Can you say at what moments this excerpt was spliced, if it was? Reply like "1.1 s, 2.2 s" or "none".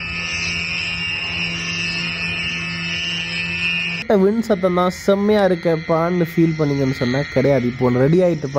4.0 s